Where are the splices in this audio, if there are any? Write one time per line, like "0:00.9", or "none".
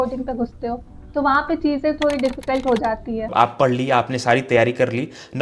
0:03.3